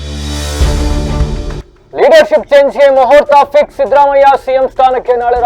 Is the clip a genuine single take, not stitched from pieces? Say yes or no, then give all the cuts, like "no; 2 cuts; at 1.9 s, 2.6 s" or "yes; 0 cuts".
no; 1 cut; at 1.6 s